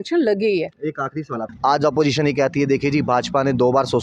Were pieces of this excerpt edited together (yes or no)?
yes